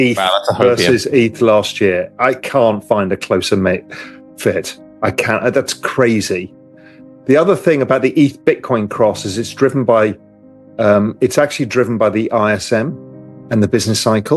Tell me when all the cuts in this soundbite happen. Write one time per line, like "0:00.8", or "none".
none